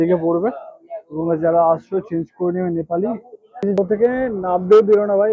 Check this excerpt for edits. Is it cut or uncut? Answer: cut